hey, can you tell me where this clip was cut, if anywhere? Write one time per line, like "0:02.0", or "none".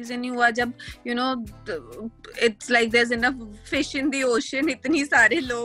none